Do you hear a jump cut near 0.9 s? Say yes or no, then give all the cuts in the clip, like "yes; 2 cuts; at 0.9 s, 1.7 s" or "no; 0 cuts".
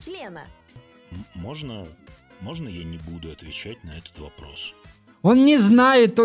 yes; 1 cut; at 0.9 s